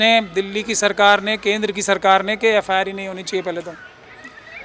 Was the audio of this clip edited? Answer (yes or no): no